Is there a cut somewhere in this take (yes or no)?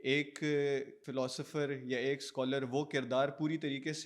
yes